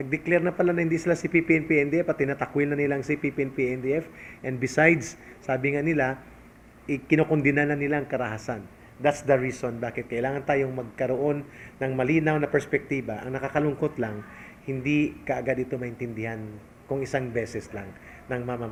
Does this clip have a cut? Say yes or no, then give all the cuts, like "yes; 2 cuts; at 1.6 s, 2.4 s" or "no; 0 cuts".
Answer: no; 0 cuts